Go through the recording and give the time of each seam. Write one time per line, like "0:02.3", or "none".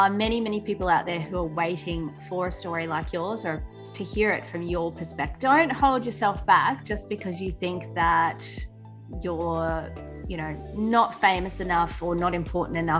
0:05.3